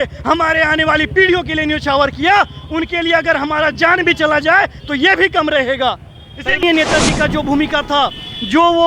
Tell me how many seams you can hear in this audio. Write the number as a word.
one